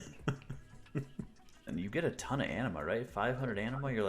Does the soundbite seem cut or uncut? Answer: cut